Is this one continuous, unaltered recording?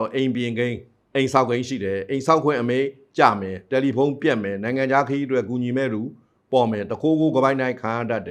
yes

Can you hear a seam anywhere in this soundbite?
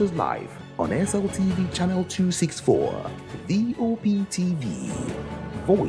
no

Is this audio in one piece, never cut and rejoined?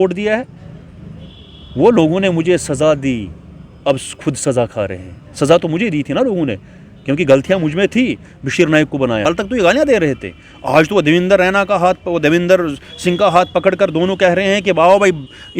no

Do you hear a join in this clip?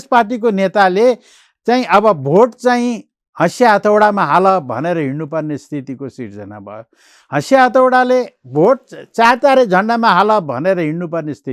no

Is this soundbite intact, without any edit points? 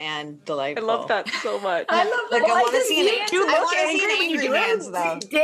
yes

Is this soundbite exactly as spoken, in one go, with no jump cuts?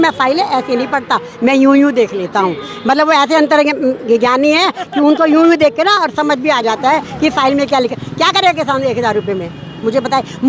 no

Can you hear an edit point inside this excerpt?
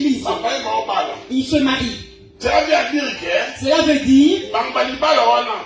no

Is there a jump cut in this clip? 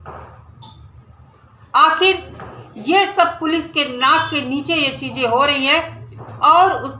no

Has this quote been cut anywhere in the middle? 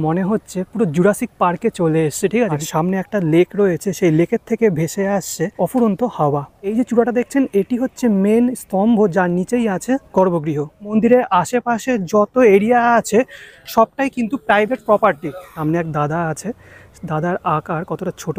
yes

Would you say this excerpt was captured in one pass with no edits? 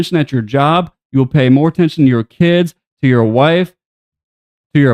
yes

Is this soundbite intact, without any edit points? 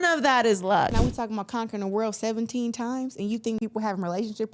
no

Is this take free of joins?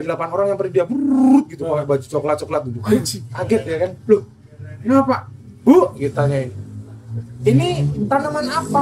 yes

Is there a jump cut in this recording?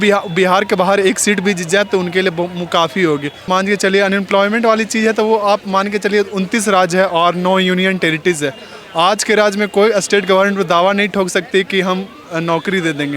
yes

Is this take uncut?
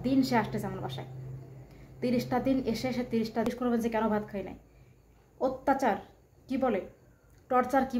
no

